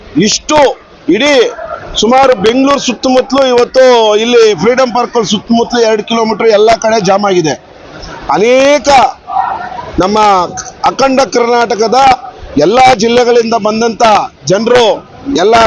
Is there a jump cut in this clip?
no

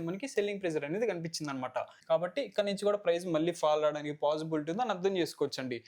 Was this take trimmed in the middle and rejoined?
yes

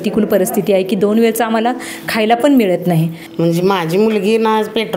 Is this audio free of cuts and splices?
no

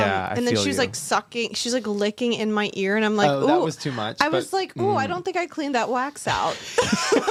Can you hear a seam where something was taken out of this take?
no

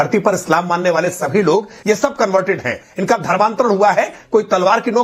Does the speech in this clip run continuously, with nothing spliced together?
no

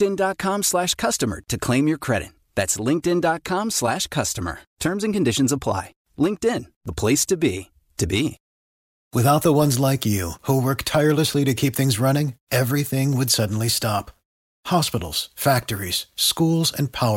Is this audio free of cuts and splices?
no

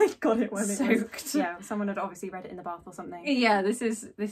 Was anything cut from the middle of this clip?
no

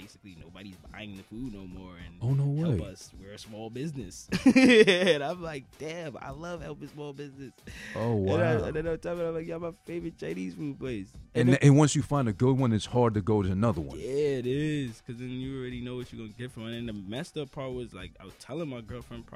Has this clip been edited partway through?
yes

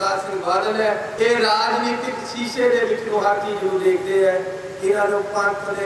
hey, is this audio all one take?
yes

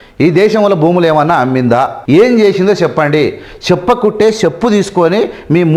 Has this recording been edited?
yes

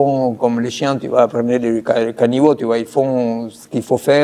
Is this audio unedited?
yes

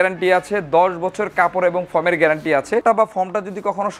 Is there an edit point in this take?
yes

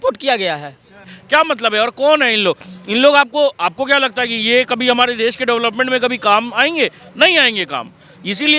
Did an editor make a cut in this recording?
yes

